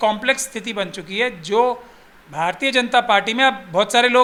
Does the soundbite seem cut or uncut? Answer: uncut